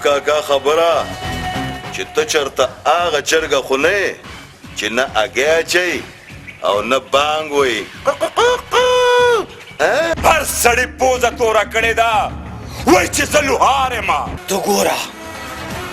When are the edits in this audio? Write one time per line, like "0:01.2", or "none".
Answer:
0:10.1
0:14.4